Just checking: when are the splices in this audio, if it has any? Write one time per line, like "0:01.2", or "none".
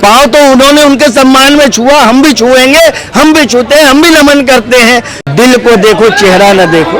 0:05.1